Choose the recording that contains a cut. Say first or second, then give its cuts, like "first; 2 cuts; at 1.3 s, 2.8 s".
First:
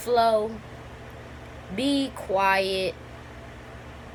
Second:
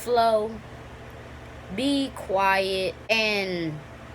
second; 1 cut; at 3.1 s